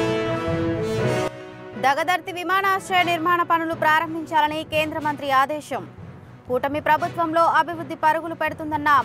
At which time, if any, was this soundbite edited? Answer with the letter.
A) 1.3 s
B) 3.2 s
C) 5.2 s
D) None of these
A